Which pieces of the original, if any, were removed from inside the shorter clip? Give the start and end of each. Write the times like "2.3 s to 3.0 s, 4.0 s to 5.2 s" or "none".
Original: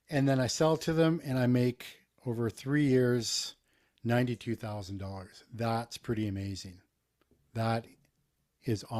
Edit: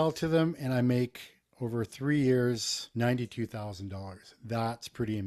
3.4 s to 3.9 s

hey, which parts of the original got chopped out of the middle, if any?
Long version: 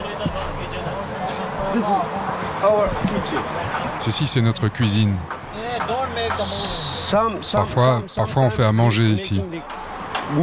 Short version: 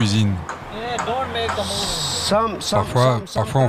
none

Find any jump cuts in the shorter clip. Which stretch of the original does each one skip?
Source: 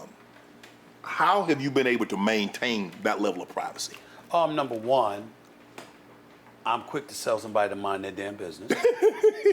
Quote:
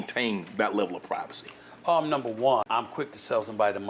5.1 s to 6.6 s

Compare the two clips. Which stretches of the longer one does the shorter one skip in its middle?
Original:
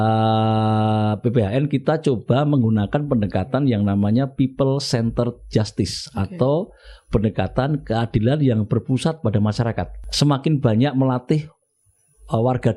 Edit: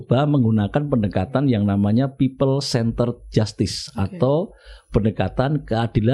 none

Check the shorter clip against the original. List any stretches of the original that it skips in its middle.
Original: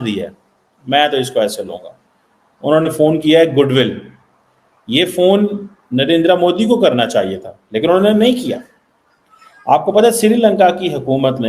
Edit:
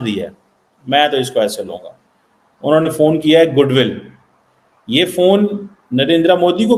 none

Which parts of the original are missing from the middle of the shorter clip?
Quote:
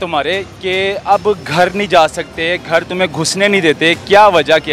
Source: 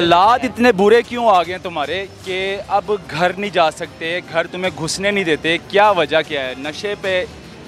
none

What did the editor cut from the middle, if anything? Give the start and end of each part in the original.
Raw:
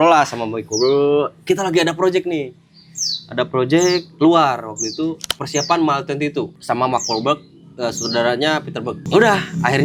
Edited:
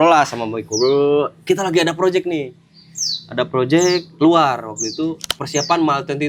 none

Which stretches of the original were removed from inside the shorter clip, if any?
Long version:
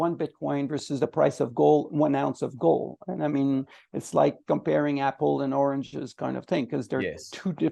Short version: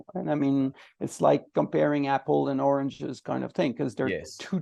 none

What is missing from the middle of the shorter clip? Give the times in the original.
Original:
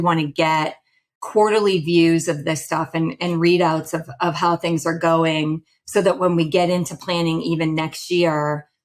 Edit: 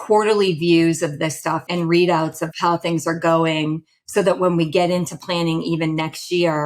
2.9 s to 3.2 s, 4.1 s to 4.4 s

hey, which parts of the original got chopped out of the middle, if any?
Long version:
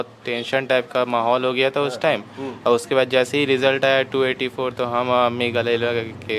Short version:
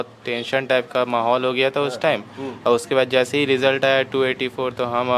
none

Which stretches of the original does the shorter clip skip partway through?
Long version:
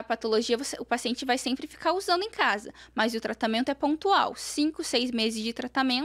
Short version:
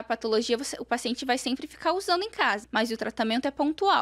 2.6 s to 2.9 s

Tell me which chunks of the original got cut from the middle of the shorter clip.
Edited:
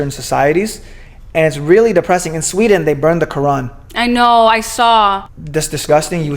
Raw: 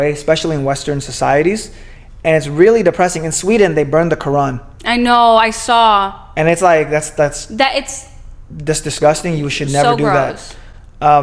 6.2 s to 8.4 s

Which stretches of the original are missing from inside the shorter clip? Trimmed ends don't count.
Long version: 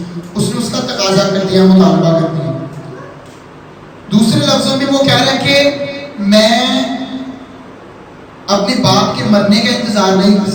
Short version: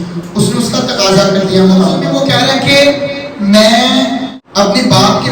2.1 s to 4.8 s, 7.1 s to 8.3 s

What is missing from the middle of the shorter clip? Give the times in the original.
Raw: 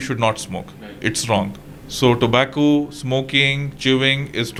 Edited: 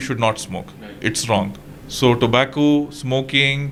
none

